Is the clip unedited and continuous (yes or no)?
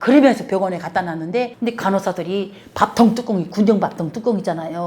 no